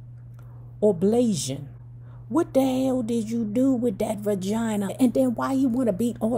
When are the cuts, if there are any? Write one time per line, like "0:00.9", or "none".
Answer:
0:04.9